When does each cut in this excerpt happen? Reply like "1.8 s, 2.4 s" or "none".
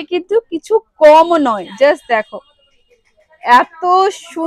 none